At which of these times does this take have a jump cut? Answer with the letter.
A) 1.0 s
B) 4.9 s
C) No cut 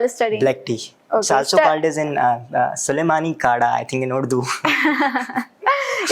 C